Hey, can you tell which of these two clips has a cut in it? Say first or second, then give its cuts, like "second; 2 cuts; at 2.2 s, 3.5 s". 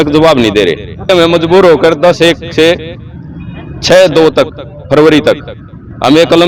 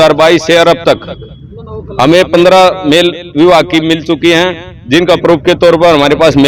first; 1 cut; at 1.1 s